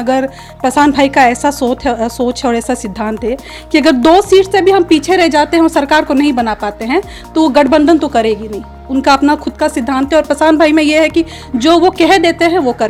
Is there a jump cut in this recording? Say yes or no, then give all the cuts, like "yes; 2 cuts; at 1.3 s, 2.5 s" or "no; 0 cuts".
no; 0 cuts